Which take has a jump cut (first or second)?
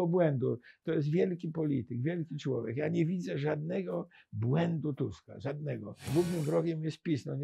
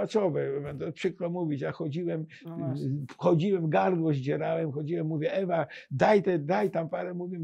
first